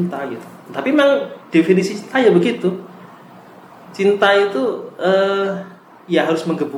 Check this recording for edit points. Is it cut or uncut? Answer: uncut